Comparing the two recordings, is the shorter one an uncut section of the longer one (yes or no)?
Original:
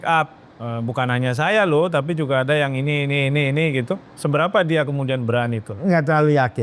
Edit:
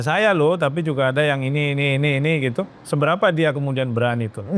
yes